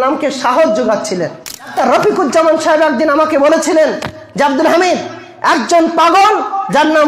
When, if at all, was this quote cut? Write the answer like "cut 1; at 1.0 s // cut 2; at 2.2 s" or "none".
cut 1; at 1.7 s